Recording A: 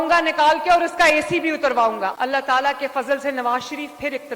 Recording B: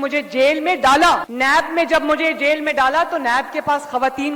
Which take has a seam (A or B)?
A